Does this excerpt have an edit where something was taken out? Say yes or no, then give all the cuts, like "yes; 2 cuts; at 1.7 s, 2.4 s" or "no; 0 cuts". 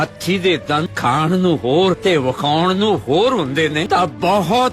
yes; 3 cuts; at 0.9 s, 2.0 s, 3.8 s